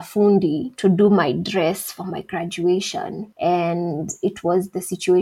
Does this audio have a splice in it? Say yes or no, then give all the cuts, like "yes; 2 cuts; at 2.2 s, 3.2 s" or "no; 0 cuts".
no; 0 cuts